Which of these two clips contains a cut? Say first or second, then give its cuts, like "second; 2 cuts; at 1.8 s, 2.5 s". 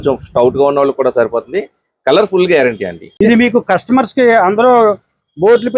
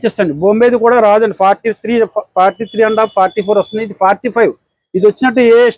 first; 1 cut; at 3.1 s